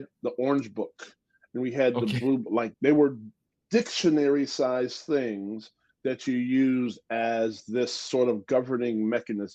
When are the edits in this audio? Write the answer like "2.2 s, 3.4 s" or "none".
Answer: 2.7 s